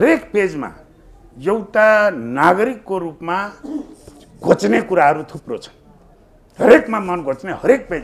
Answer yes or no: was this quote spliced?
no